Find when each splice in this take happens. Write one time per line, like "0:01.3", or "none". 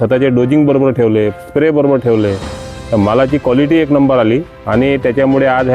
0:04.6

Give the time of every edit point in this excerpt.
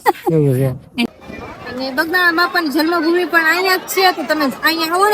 0:01.1

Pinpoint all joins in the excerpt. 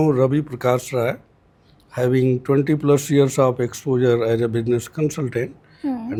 none

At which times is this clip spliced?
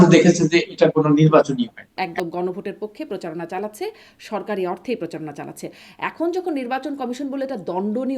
0:02.0

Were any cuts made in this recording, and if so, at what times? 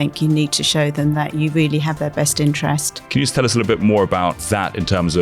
0:02.9
0:04.4

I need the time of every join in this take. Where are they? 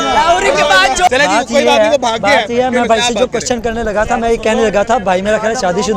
0:01.1

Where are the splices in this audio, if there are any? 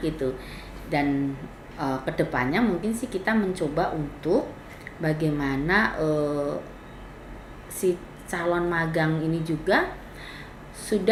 none

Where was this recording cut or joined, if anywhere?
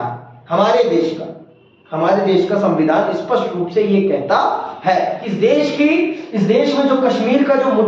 0:05.2

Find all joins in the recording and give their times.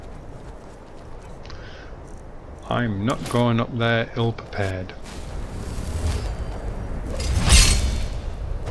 none

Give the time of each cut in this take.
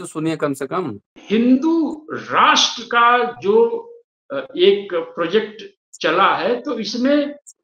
0:01.1

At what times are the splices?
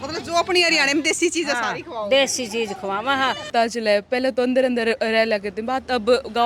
0:03.5

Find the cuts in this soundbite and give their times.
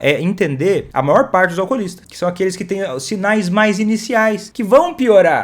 0:00.9
0:02.0
0:04.5

